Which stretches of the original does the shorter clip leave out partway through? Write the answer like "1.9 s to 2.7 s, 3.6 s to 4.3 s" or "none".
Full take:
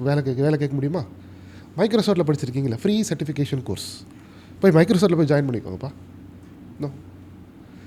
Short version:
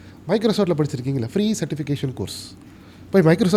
none

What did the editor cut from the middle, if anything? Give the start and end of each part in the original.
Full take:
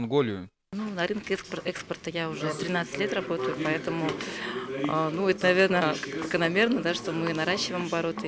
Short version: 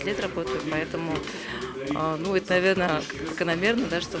none

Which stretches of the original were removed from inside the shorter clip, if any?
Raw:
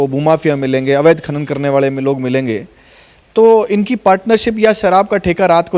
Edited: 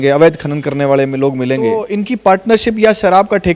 2.7 s to 3.7 s

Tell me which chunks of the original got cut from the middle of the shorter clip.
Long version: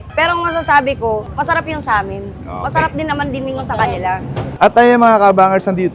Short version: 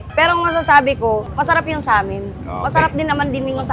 none

